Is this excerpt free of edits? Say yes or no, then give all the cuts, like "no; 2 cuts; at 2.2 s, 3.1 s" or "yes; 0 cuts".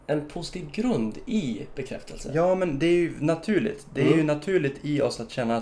yes; 0 cuts